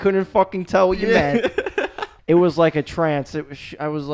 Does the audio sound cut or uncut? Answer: cut